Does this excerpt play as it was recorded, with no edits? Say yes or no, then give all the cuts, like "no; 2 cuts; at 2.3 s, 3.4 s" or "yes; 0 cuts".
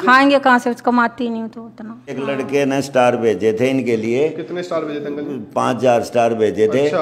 no; 1 cut; at 2.1 s